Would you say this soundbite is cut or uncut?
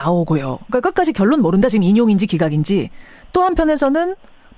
cut